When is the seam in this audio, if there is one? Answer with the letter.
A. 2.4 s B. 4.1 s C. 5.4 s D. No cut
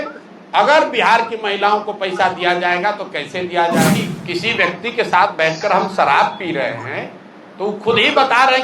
B